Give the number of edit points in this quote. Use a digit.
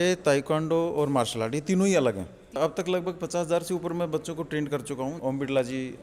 2